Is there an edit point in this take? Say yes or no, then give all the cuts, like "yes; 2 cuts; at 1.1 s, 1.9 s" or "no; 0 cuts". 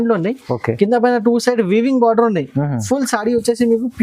no; 0 cuts